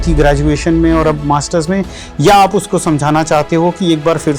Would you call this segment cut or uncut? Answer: uncut